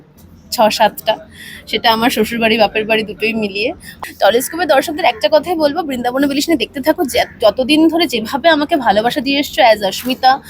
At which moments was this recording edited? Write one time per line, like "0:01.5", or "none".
0:03.9